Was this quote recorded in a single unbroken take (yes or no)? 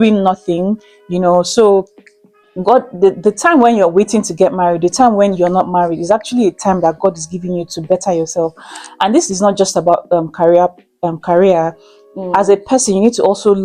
yes